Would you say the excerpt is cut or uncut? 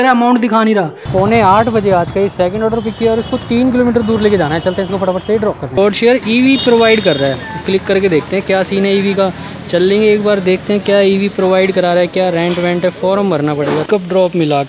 cut